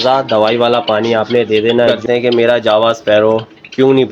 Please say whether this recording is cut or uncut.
cut